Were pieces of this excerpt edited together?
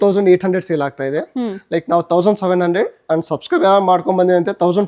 no; 0 cuts

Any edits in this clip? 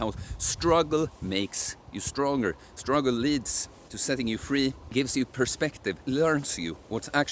yes; 2 cuts; at 4.9 s, 6.0 s

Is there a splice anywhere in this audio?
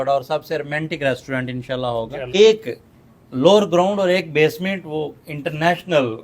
yes; 1 cut; at 2.2 s

